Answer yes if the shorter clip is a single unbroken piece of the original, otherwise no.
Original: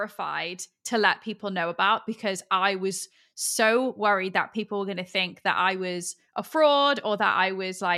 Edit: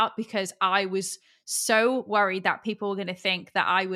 yes